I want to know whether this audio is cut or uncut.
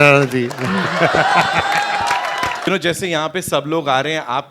cut